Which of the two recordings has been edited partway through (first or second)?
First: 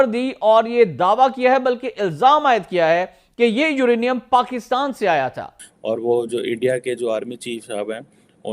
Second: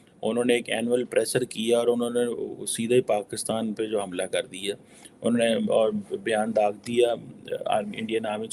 first